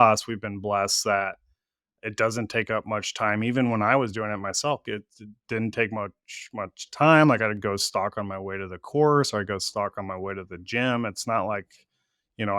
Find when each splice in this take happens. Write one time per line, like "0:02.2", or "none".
0:04.9